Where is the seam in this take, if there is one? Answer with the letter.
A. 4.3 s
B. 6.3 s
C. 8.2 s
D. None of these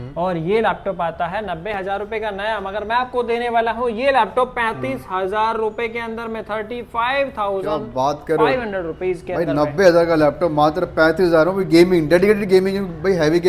D